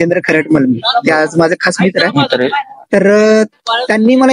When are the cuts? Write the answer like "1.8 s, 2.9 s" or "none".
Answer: none